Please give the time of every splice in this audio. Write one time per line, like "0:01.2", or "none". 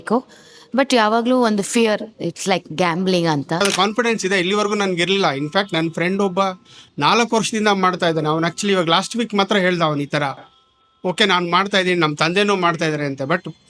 0:03.6